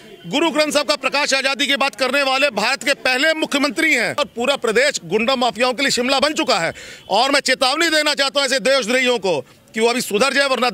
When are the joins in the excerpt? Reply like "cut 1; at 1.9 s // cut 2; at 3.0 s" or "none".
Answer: cut 1; at 4.2 s